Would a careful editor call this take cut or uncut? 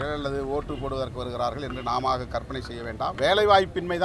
cut